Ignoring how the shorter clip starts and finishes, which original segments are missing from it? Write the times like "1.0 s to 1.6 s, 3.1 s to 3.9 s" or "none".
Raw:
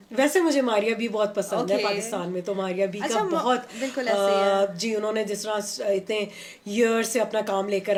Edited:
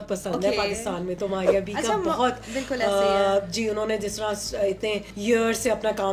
6.4 s to 6.6 s